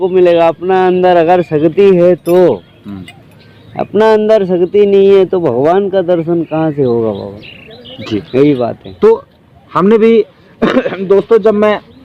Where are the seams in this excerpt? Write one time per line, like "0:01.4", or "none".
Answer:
none